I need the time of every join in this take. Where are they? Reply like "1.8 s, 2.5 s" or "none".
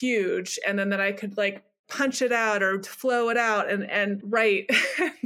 1.8 s